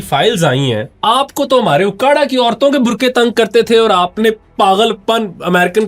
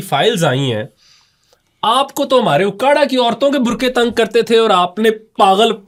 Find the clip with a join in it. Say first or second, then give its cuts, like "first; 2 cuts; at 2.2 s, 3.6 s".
first; 1 cut; at 0.9 s